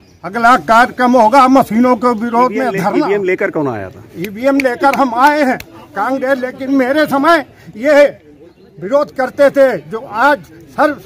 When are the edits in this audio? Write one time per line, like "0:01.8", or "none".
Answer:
0:02.8